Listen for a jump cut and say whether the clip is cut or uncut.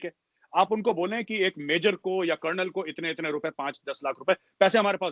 uncut